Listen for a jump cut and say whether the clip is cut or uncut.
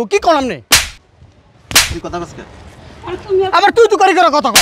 uncut